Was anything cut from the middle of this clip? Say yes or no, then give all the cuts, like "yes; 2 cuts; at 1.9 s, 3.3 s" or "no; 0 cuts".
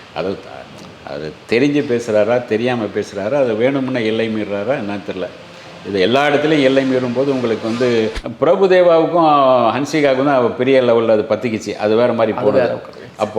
yes; 1 cut; at 8.2 s